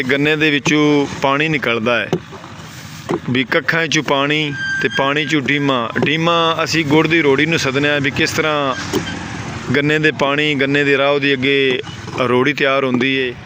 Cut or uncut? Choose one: uncut